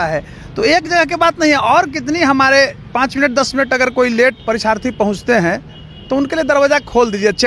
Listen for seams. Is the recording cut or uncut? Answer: cut